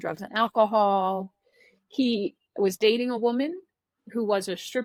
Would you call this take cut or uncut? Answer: uncut